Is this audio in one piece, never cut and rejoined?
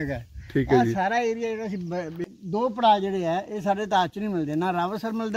no; 1 cut; at 2.2 s

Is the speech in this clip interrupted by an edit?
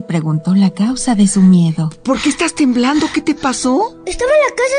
no; 0 cuts

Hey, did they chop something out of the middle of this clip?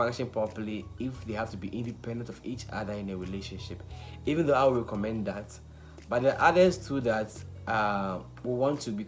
no; 0 cuts

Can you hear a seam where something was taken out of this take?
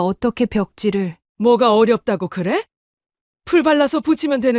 yes; 1 cut; at 1.2 s

